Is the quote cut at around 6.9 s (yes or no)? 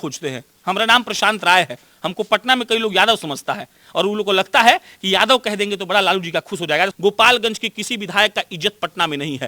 yes